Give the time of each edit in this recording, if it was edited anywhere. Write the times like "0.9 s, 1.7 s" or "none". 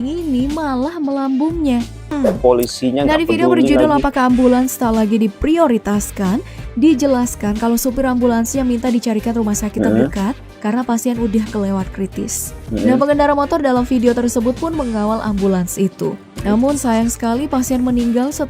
2.0 s